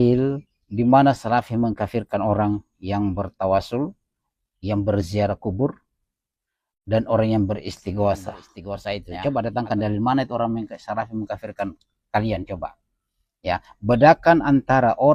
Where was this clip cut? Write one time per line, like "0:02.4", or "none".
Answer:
none